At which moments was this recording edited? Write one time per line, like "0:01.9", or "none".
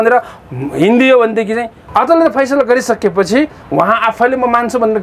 0:01.8